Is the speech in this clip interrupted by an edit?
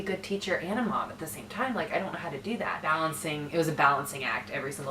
yes; 1 cut; at 3.0 s

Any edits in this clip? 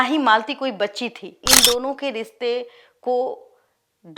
yes; 1 cut; at 1.4 s

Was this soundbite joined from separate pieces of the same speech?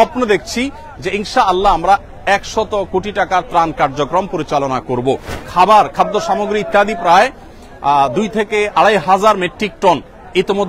yes; 1 cut; at 5.4 s

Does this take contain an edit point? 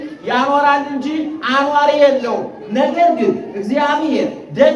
no; 0 cuts

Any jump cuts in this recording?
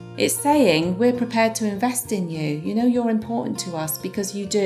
no; 0 cuts

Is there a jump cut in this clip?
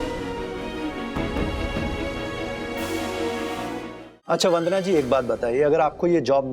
yes; 1 cut; at 4.0 s

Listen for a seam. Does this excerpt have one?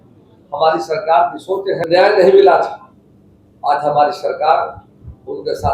yes; 1 cut; at 1.8 s

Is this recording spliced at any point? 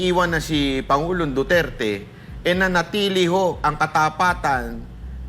no; 0 cuts

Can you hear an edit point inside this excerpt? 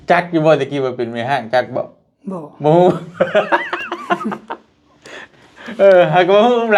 no; 0 cuts

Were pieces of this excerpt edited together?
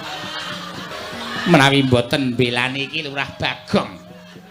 yes; 1 cut; at 0.9 s

